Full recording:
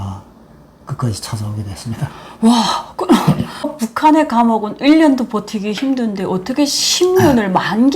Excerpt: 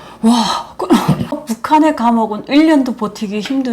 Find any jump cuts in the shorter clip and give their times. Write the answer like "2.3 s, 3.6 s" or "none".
1.3 s